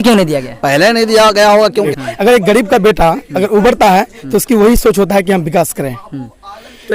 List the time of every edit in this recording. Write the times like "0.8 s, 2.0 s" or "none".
1.9 s

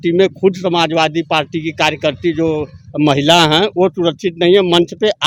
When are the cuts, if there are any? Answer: none

